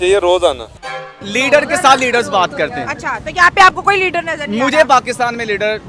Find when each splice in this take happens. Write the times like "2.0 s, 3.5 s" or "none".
1.1 s, 4.7 s